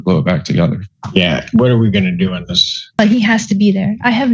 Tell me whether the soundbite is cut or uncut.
cut